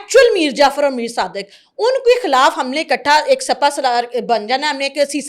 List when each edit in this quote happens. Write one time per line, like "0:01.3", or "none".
none